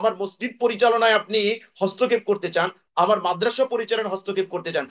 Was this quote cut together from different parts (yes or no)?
no